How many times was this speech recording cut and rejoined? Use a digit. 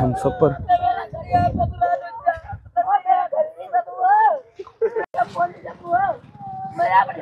1